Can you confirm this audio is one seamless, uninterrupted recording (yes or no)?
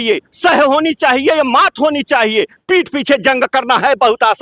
yes